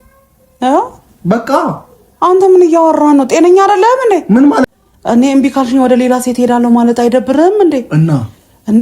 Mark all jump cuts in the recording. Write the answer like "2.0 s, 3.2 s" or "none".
4.7 s